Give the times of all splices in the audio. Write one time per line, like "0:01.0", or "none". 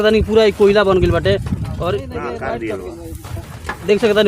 0:02.1